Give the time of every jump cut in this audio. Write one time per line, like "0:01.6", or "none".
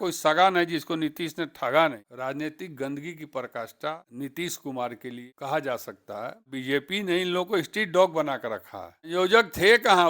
0:02.1
0:04.1
0:05.2
0:06.5
0:09.1